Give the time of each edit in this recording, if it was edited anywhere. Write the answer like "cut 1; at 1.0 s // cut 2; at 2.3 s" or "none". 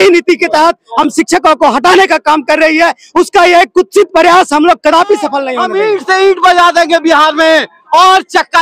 cut 1; at 5.5 s